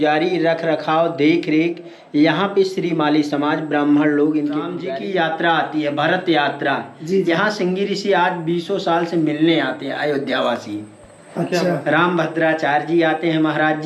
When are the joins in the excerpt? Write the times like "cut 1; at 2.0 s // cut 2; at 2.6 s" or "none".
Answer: cut 1; at 4.8 s